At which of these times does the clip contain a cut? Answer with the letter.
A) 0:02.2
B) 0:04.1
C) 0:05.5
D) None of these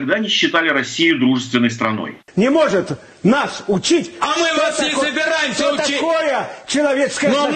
A